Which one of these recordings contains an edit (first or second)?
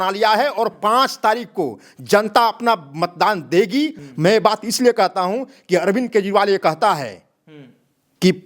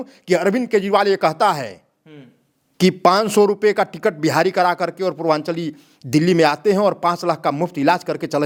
first